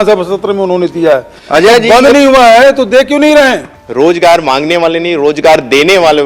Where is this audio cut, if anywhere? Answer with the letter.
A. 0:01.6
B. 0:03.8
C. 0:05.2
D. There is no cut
B